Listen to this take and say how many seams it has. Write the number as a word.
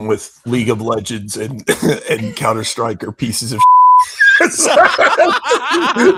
zero